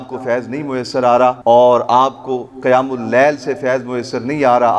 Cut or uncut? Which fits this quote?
cut